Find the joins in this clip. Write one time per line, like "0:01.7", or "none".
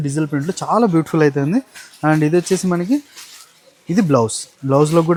none